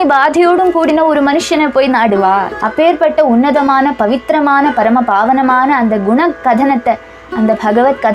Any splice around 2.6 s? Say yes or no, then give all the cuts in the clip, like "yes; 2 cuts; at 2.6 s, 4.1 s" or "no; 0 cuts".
yes; 1 cut; at 2.6 s